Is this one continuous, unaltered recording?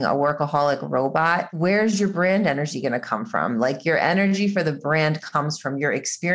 no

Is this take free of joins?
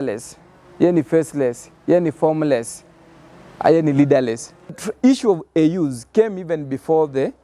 no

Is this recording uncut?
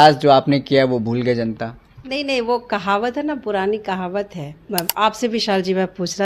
no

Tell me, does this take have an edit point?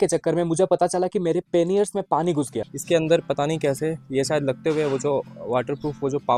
no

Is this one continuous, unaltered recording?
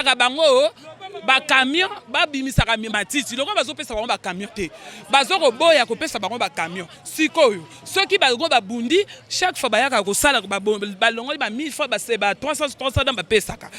yes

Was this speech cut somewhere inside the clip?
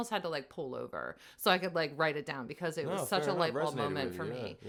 no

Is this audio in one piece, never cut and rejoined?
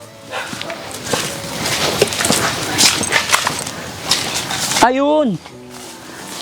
yes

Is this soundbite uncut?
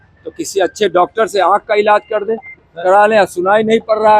yes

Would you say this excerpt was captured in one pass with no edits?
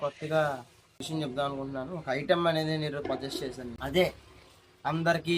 no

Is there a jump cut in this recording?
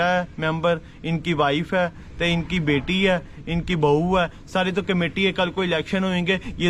no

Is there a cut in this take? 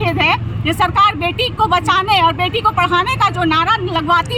no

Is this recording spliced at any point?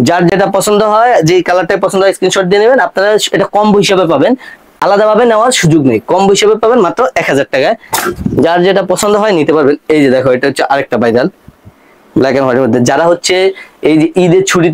no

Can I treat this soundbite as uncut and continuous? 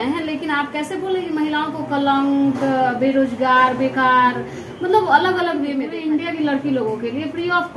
no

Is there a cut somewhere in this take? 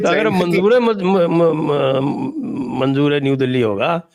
no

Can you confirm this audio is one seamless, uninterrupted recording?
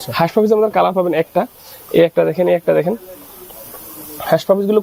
yes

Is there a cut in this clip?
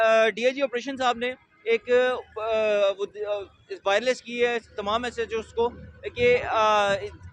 no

